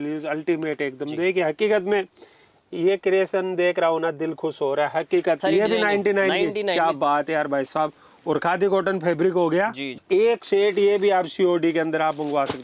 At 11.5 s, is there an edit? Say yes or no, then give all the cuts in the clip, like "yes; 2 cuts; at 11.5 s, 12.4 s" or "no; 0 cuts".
no; 2 cuts; at 5.4 s, 10.0 s